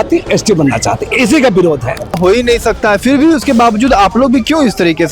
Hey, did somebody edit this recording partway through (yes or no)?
yes